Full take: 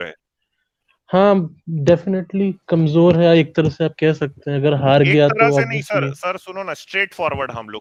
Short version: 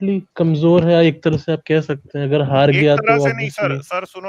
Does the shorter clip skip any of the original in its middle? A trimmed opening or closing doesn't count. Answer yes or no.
no